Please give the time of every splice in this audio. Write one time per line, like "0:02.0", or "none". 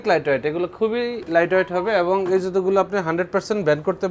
0:01.2